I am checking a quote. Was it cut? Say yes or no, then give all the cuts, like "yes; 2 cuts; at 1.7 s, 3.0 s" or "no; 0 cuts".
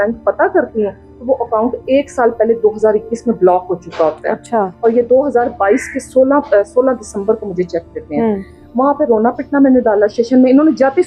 no; 0 cuts